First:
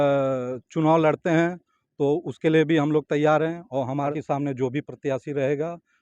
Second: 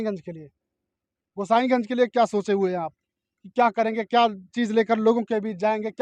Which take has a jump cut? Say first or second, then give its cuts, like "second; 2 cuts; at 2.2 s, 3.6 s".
first; 1 cut; at 4.2 s